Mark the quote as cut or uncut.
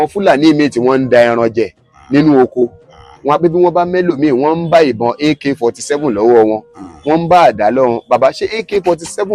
uncut